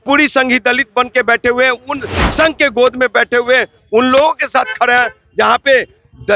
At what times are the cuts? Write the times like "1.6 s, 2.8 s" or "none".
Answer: none